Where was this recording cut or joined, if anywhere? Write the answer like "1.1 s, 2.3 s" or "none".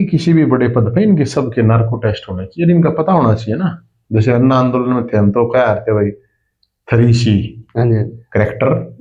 none